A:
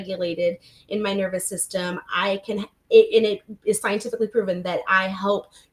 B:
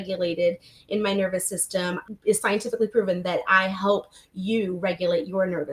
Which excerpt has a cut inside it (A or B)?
B